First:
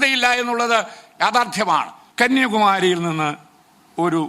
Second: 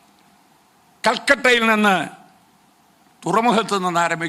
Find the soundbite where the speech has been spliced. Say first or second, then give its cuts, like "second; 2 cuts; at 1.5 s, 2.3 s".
first; 1 cut; at 2.0 s